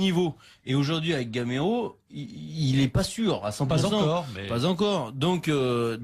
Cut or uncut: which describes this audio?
cut